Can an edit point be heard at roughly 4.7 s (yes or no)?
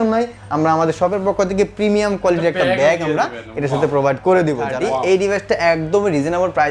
yes